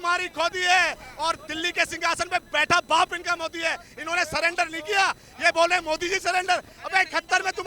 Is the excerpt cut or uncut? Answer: uncut